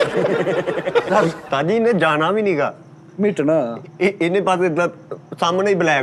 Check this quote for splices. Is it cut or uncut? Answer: cut